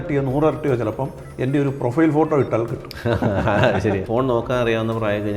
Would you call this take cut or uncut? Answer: cut